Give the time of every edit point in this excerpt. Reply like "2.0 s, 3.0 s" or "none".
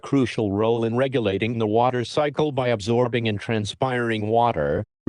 none